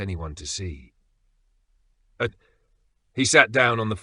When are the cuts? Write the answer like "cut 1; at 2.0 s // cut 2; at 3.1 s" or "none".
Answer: cut 1; at 2.3 s